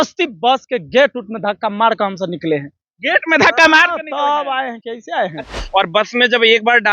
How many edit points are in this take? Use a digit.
1